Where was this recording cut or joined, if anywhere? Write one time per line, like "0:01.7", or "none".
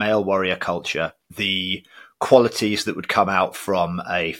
0:01.3